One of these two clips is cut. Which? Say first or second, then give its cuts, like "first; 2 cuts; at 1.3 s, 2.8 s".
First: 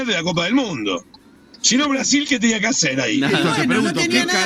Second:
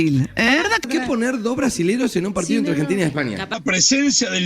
second; 2 cuts; at 0.8 s, 3.5 s